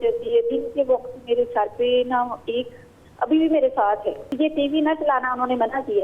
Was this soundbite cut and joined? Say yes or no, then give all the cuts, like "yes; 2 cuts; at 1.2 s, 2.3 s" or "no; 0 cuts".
yes; 1 cut; at 4.2 s